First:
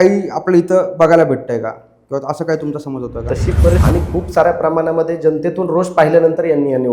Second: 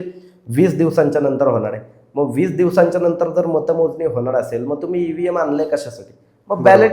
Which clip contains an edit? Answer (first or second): first